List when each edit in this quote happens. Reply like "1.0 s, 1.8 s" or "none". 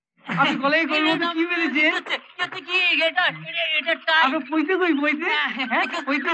none

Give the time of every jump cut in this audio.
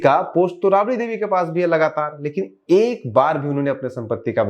none

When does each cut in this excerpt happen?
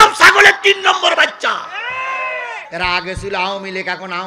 2.6 s

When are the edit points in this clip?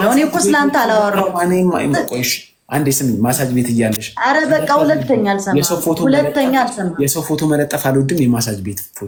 none

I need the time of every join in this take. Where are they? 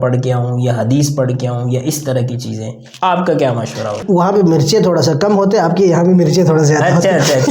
4.0 s

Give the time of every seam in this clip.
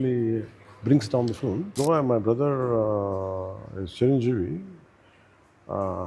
1.8 s

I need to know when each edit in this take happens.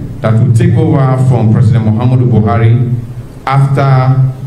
none

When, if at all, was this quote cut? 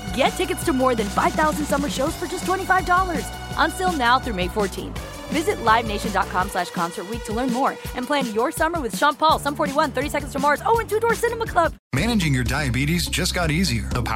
none

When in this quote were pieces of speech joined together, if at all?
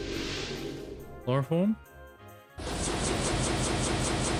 none

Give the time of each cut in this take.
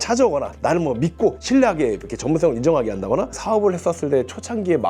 3.3 s

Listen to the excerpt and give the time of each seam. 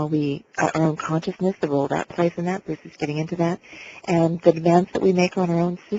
none

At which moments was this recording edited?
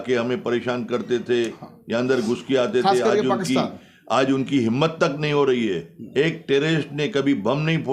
none

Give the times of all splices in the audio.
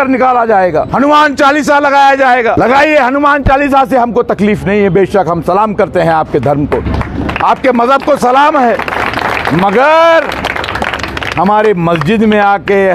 0.9 s, 2.6 s

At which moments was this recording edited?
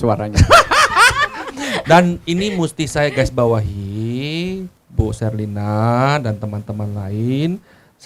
none

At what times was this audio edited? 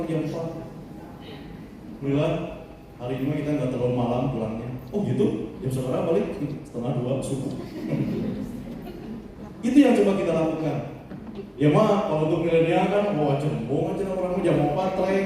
2.0 s

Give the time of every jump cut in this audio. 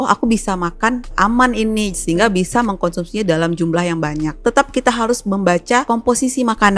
1.1 s, 4.4 s, 5.8 s

